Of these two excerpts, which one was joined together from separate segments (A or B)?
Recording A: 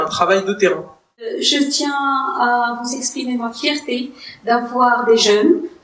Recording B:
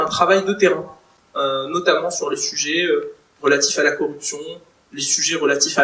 A